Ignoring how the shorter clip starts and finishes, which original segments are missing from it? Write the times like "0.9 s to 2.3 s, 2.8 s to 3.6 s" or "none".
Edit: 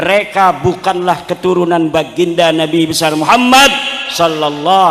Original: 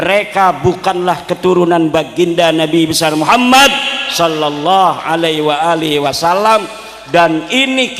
none